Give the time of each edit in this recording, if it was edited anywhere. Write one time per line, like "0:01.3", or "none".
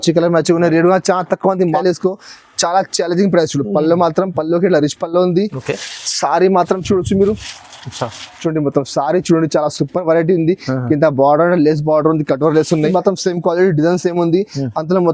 0:01.6
0:12.9